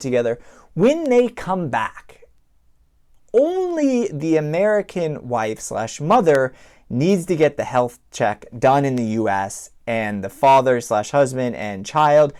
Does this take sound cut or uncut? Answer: uncut